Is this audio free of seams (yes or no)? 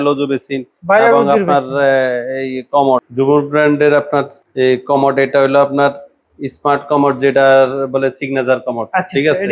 no